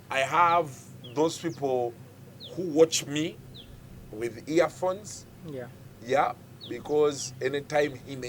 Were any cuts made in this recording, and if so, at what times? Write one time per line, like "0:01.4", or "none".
none